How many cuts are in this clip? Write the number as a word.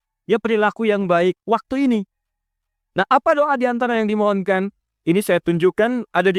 zero